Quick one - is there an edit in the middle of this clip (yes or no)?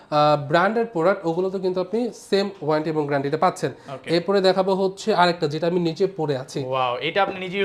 no